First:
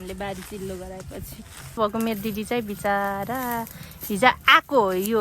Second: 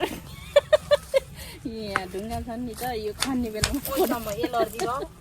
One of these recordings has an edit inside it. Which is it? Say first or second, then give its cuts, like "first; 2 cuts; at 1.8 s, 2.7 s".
first; 1 cut; at 1.8 s